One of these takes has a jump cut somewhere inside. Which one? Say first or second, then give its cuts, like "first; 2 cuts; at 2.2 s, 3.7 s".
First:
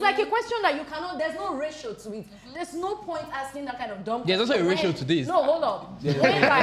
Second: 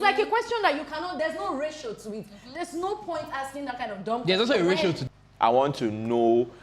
second; 1 cut; at 5.0 s